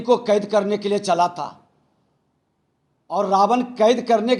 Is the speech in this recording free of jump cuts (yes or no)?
yes